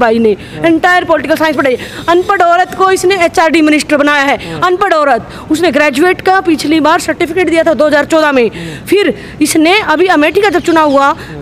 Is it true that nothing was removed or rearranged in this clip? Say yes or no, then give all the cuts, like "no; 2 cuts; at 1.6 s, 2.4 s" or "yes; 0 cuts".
yes; 0 cuts